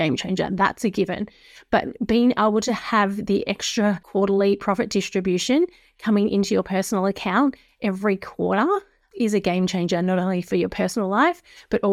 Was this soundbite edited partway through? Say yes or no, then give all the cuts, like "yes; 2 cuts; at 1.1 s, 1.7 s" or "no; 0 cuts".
yes; 1 cut; at 4.0 s